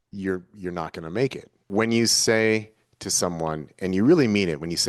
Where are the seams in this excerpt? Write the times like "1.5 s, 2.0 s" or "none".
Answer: 1.6 s